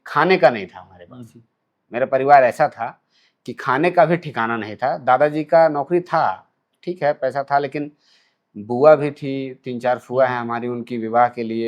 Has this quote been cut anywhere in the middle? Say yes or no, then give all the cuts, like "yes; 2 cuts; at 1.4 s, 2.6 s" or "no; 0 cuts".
no; 0 cuts